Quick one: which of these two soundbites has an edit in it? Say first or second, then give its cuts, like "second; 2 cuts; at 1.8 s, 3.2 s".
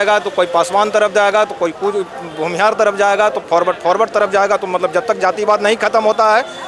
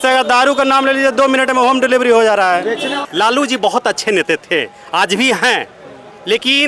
second; 1 cut; at 3.0 s